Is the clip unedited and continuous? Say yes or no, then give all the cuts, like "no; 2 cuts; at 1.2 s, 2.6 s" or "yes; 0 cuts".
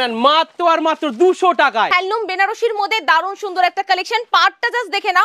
no; 1 cut; at 1.9 s